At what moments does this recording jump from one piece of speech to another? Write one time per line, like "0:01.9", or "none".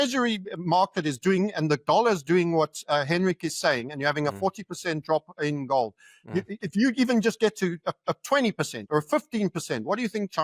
none